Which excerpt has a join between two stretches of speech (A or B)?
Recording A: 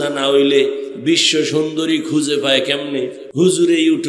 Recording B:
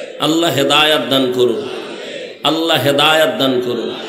A